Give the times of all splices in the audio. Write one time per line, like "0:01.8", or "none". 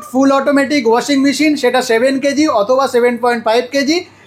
none